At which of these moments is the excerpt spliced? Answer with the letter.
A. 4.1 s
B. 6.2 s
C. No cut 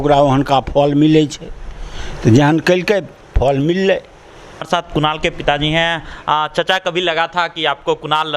C